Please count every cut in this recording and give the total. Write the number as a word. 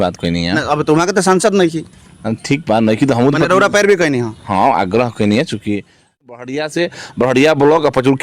one